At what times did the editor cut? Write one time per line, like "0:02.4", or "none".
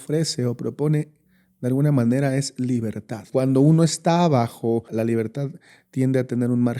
0:03.3
0:04.9